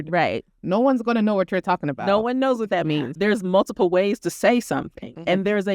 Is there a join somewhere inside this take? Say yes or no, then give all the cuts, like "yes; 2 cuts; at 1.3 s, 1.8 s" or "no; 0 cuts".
yes; 1 cut; at 3.1 s